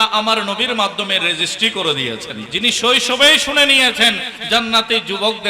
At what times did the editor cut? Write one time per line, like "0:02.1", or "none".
0:02.5